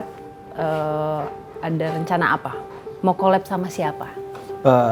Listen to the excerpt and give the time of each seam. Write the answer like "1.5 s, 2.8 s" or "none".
none